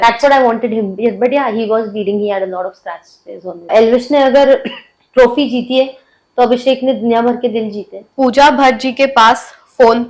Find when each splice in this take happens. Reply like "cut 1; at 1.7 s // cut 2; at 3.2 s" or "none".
cut 1; at 3.7 s // cut 2; at 8.0 s